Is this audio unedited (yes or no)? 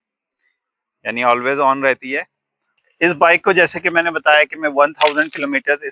no